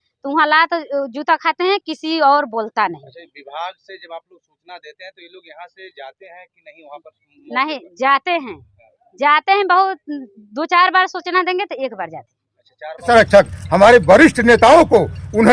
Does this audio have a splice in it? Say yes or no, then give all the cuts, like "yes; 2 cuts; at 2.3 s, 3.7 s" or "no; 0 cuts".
yes; 1 cut; at 13.1 s